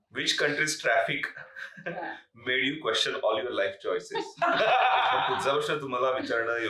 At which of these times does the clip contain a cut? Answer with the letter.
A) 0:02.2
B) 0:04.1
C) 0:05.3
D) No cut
C